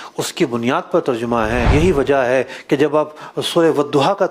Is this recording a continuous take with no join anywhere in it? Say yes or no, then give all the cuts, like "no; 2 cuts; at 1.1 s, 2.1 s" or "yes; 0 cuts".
no; 1 cut; at 1.7 s